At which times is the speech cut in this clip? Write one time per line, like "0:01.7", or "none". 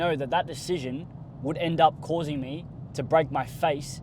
none